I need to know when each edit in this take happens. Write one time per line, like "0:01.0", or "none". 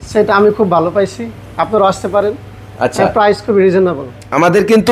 none